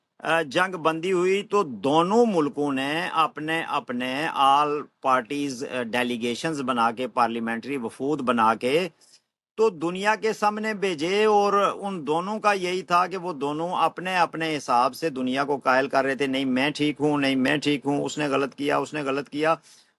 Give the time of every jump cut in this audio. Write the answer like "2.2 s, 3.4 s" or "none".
none